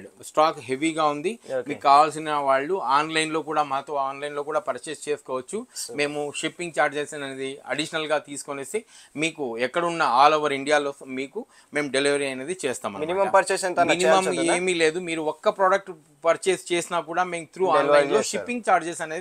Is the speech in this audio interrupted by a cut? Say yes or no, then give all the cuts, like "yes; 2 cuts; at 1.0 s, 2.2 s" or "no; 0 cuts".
no; 0 cuts